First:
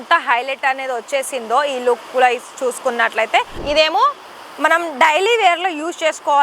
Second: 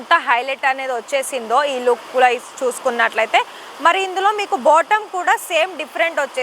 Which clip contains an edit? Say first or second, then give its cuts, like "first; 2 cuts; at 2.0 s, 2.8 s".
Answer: first; 1 cut; at 3.6 s